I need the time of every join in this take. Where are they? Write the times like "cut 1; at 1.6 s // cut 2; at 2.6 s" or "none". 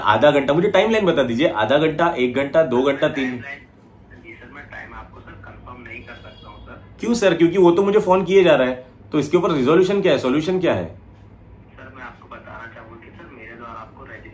none

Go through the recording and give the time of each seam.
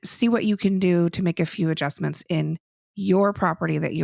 none

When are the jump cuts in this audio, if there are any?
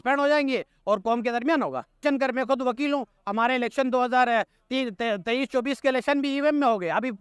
cut 1; at 2.0 s

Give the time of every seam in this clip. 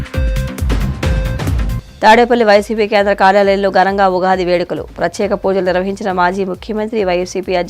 cut 1; at 1.5 s

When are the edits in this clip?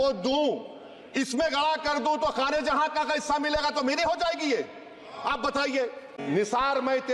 cut 1; at 6.1 s

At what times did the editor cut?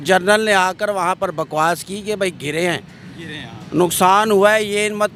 none

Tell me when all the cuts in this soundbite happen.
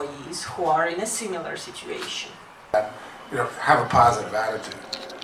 cut 1; at 2.7 s

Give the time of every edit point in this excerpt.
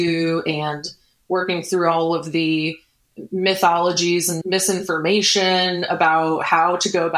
cut 1; at 4.4 s

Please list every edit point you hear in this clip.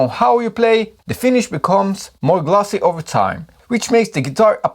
cut 1; at 0.9 s

